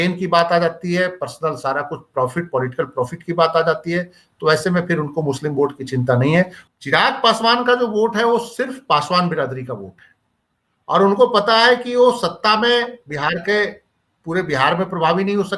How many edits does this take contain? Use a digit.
1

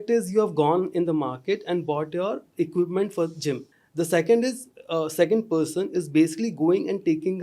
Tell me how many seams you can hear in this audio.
1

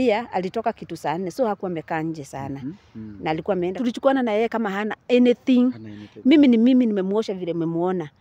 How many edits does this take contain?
1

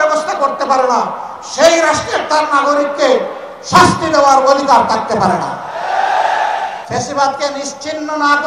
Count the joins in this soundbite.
1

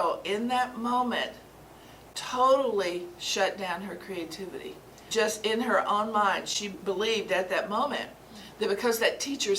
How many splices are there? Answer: 2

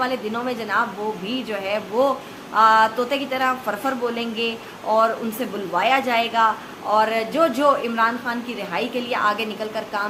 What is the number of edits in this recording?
0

